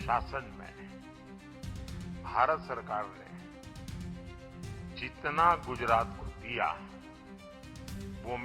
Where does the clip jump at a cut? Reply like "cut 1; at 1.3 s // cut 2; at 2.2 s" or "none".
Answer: cut 1; at 3.1 s // cut 2; at 4.7 s